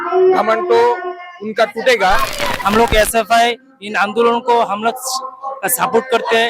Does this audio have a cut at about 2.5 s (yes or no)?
yes